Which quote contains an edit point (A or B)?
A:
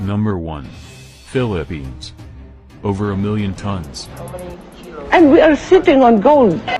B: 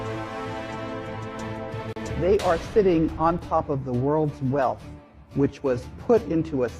B